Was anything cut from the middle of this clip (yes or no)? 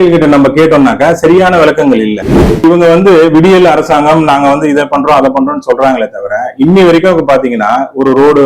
yes